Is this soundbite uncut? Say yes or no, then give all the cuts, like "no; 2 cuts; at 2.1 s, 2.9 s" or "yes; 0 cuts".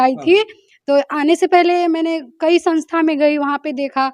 yes; 0 cuts